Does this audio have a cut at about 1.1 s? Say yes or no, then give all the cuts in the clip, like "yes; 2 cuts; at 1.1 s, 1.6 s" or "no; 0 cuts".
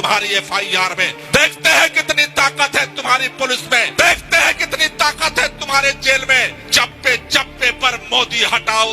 yes; 3 cuts; at 1.1 s, 3.9 s, 6.6 s